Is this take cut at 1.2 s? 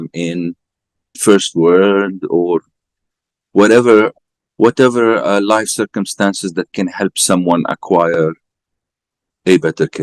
yes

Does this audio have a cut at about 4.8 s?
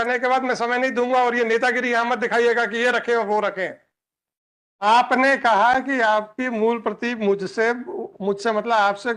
yes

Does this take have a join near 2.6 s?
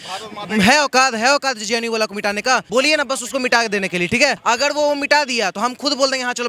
yes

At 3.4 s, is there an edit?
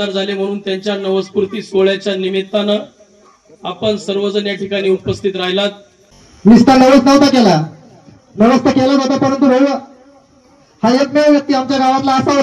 no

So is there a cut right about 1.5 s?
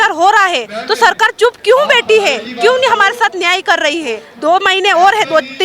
no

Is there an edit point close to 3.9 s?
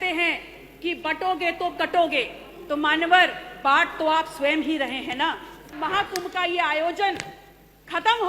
no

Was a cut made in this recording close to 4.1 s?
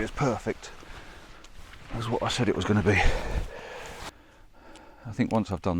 yes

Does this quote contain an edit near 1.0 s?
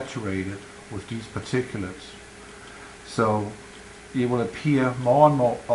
no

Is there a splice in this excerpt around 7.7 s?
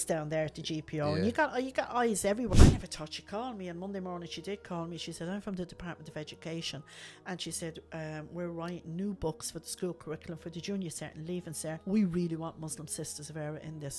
no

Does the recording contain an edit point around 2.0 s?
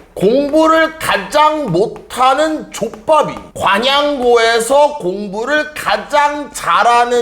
no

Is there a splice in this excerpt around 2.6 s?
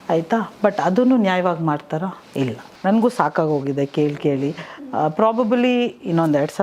yes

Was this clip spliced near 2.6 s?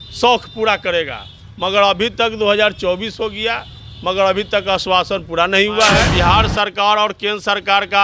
no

